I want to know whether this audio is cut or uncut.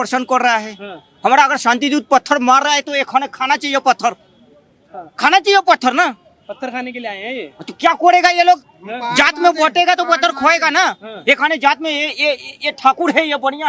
uncut